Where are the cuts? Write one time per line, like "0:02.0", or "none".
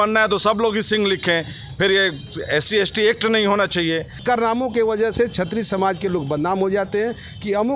0:04.2